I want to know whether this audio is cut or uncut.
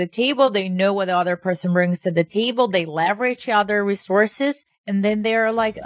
cut